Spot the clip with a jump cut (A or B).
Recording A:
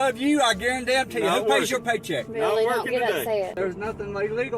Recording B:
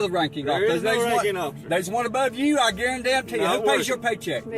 A